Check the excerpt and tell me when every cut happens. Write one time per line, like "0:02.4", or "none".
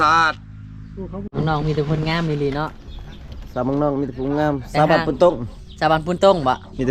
0:01.2